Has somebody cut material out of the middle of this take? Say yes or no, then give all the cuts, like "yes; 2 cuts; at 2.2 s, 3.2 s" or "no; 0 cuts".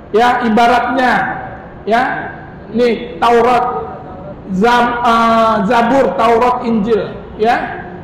no; 0 cuts